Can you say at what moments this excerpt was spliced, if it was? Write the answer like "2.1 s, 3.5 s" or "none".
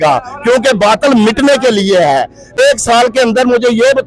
2.6 s